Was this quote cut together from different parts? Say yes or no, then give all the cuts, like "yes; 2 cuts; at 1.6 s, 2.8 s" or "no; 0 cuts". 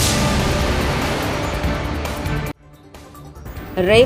no; 0 cuts